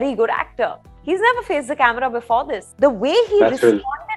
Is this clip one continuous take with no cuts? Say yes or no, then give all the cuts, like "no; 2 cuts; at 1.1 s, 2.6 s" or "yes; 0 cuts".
no; 1 cut; at 2.6 s